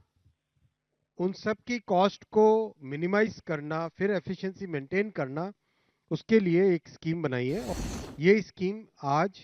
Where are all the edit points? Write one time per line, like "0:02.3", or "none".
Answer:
0:07.7